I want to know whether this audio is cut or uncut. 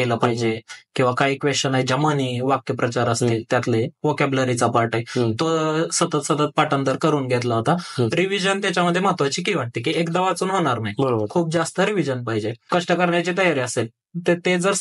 cut